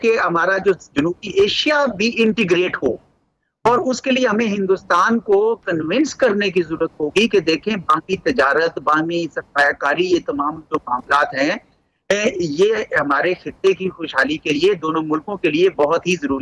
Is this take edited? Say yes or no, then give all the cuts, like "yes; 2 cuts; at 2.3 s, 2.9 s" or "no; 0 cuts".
no; 0 cuts